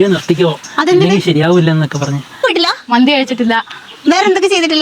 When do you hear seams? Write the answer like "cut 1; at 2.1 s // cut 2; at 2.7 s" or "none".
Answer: cut 1; at 2.4 s